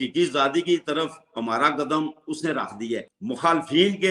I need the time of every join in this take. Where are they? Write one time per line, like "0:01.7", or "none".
0:03.0